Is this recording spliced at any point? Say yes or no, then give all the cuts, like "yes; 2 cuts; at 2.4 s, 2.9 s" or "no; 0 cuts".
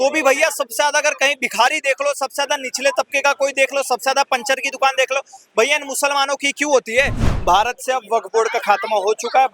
yes; 1 cut; at 7.2 s